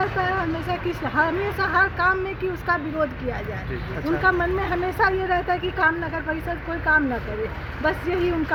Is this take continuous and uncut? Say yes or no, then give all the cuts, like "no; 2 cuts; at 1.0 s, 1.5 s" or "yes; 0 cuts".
yes; 0 cuts